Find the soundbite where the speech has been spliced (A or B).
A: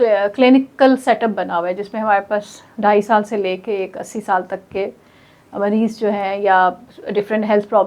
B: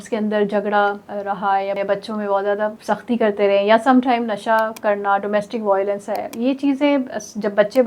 B